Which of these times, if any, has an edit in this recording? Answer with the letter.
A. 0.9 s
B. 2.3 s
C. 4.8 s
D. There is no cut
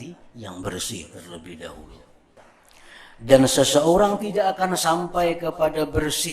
B